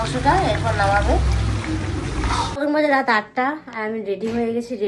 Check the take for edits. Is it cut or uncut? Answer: cut